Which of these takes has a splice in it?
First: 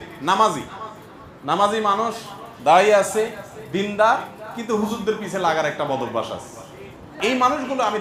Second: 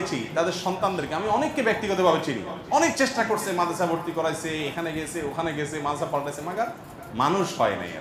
first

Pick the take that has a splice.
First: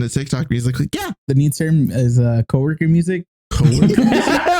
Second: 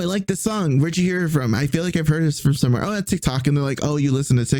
first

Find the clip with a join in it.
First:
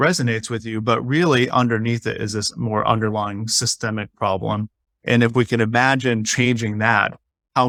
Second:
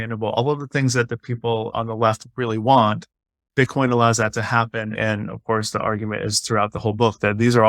second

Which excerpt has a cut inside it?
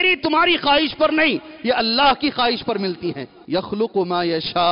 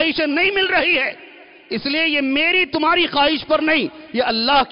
first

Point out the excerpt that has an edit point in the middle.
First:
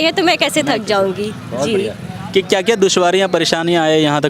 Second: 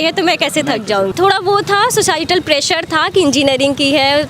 second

